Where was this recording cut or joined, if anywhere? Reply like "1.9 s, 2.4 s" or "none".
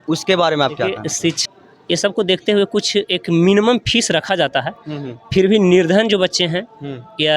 1.4 s